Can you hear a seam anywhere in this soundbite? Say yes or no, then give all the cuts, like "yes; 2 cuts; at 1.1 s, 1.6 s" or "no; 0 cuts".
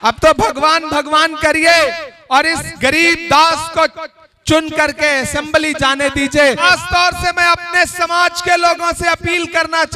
yes; 1 cut; at 6.6 s